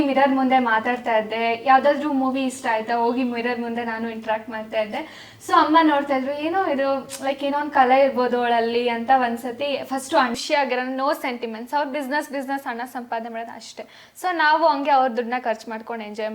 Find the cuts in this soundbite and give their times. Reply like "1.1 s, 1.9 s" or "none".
10.4 s